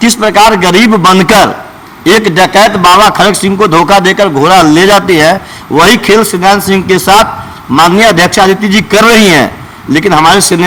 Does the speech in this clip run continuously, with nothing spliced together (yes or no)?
yes